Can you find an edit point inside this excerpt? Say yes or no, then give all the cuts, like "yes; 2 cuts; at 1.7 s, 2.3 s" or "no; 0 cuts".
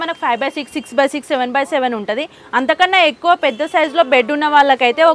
no; 0 cuts